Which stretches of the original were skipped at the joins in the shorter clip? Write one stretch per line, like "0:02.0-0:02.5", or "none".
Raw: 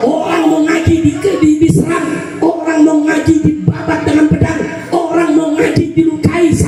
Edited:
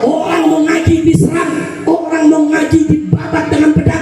0:01.0-0:01.6